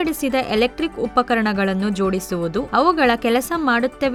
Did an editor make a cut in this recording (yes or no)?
no